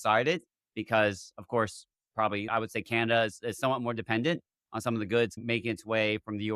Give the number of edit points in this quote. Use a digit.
2